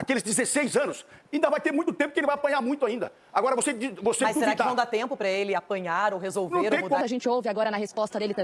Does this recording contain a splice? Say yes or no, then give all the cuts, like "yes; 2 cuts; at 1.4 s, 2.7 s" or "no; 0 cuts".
yes; 1 cut; at 7.0 s